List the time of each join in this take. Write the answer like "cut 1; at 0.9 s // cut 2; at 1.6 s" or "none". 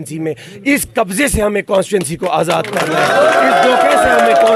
none